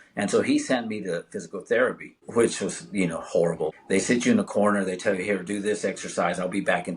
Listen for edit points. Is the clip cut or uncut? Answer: cut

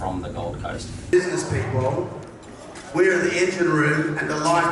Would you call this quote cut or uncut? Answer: cut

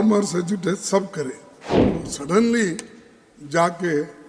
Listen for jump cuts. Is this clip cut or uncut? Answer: cut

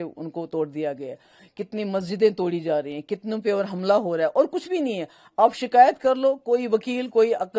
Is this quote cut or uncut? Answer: uncut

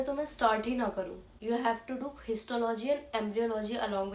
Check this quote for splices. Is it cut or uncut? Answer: cut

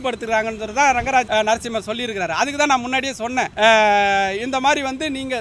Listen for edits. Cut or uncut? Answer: cut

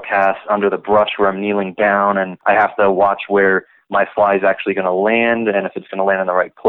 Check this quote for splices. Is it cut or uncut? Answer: cut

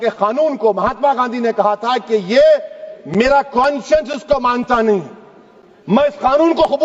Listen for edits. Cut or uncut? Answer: uncut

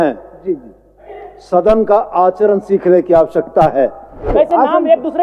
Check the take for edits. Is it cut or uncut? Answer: cut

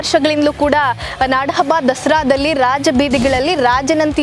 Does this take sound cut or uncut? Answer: uncut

